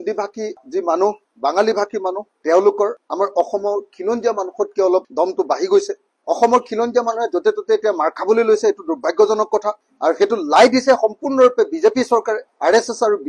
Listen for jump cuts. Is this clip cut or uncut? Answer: uncut